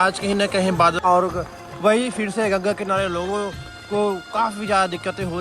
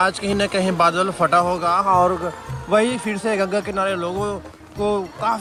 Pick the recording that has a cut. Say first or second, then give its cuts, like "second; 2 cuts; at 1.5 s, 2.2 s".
first; 1 cut; at 1.0 s